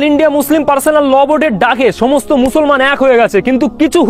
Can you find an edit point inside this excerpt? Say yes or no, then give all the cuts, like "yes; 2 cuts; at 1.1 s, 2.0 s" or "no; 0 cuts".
no; 0 cuts